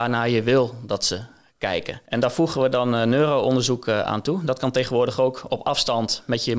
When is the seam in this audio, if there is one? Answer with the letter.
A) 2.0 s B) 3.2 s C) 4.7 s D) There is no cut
A